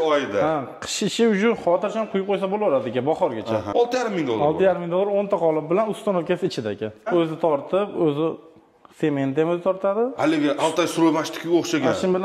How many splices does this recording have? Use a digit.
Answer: 2